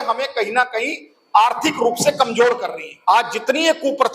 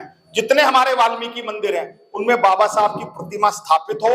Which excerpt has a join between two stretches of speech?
first; 1 cut; at 2.9 s

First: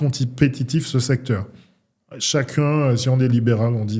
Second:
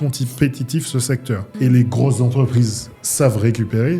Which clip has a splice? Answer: second; 1 cut; at 1.5 s

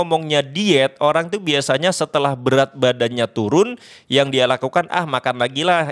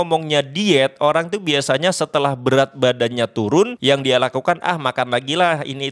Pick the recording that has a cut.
second; 1 cut; at 3.8 s

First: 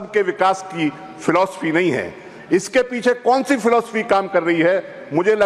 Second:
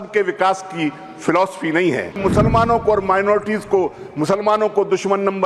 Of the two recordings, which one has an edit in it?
second; 1 cut; at 2.2 s

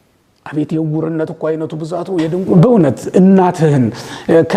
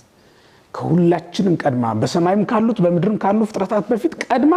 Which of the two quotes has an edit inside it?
first; 1 cut; at 2.4 s

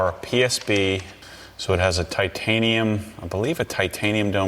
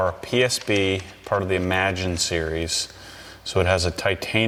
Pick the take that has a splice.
first; 1 cut; at 1.1 s

